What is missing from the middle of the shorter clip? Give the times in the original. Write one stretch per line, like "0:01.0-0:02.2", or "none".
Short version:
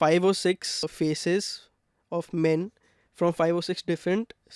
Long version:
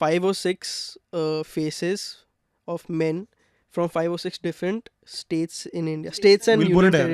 0:00.9-0:01.5